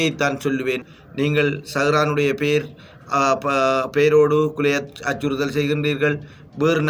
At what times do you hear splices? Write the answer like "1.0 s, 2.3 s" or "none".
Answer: 0.9 s